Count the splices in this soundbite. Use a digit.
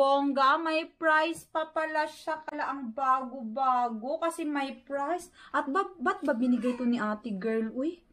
0